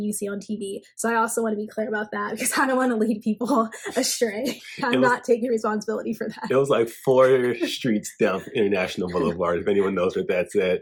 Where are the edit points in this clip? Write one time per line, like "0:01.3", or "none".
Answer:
none